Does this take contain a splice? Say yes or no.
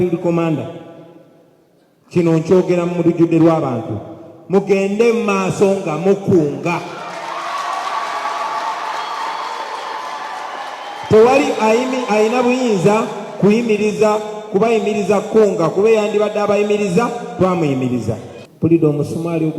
yes